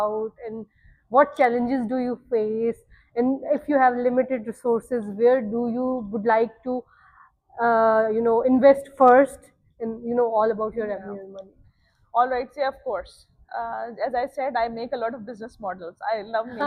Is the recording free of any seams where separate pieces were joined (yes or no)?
yes